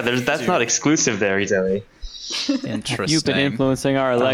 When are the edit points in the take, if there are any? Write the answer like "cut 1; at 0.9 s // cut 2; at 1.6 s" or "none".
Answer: cut 1; at 3.1 s